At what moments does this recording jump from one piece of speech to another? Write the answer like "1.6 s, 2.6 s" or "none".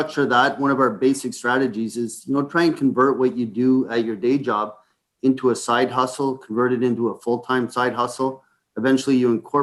none